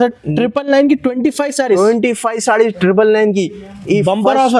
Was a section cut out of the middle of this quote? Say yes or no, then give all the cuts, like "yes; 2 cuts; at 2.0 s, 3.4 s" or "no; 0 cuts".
no; 0 cuts